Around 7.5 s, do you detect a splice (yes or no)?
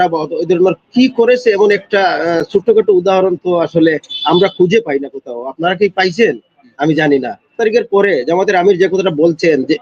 yes